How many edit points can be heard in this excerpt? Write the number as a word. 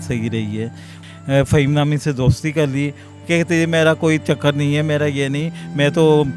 two